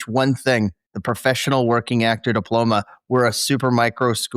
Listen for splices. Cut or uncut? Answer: uncut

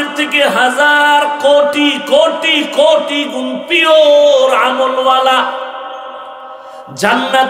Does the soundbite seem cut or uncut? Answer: uncut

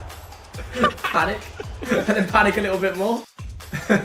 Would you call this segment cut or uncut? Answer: uncut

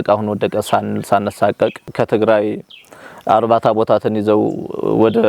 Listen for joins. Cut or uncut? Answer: cut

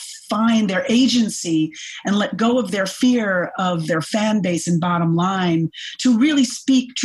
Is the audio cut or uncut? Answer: uncut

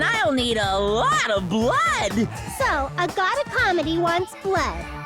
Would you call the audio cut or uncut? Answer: uncut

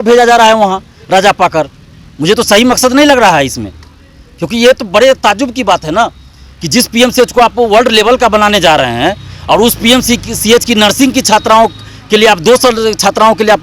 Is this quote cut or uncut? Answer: uncut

